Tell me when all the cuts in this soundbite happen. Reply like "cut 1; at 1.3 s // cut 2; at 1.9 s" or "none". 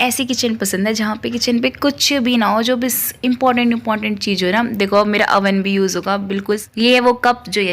cut 1; at 6.6 s